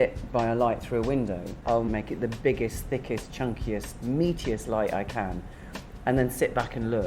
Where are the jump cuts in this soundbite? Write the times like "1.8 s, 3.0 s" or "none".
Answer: 1.9 s